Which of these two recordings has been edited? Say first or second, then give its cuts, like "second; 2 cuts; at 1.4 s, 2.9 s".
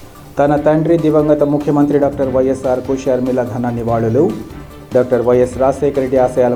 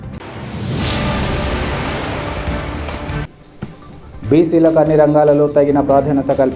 second; 1 cut; at 3.2 s